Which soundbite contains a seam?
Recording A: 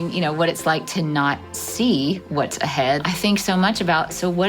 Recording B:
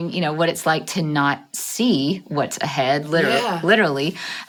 A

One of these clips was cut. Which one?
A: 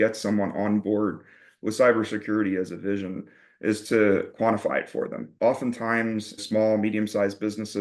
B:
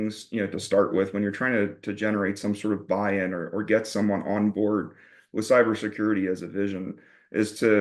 A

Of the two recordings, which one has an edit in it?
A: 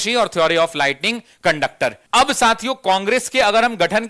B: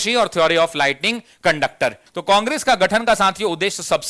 B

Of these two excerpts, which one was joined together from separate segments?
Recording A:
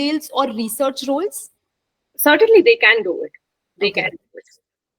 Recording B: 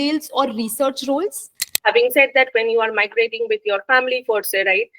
B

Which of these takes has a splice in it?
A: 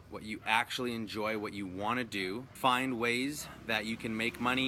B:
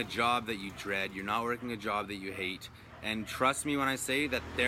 A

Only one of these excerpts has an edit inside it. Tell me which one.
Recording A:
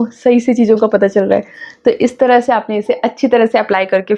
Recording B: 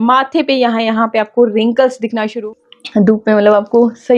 B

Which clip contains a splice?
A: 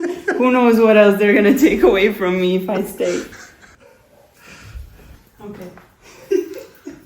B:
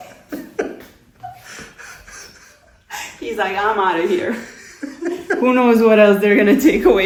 A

